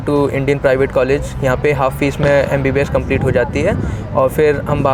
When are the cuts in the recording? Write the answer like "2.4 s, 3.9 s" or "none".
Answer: none